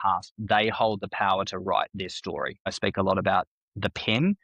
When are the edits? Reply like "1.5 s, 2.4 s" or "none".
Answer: 2.7 s

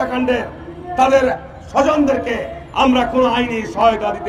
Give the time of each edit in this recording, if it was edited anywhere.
none

